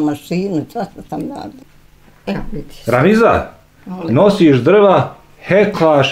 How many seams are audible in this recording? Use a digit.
1